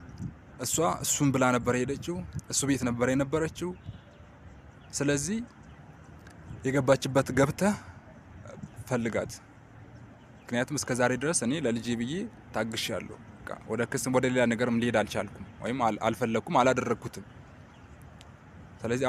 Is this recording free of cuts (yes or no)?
yes